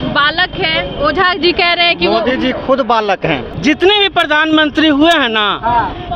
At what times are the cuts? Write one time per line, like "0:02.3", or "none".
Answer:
0:03.5